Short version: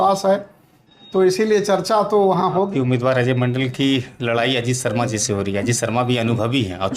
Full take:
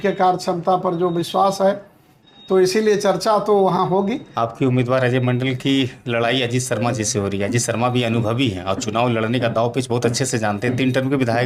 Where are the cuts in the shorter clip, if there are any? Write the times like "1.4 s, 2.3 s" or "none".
2.7 s